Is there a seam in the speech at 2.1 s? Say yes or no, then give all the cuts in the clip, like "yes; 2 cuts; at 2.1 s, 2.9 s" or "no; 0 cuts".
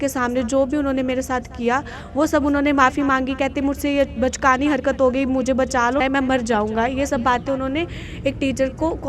no; 1 cut; at 6.0 s